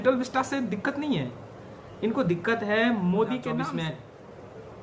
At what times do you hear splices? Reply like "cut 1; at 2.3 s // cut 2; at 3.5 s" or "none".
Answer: cut 1; at 3.8 s